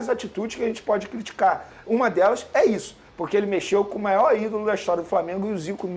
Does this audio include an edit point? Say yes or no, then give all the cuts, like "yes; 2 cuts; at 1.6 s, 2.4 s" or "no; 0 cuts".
no; 0 cuts